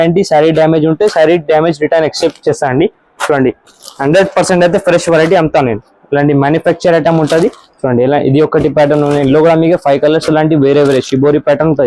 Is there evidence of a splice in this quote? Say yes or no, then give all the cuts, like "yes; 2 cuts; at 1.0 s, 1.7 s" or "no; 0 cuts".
no; 0 cuts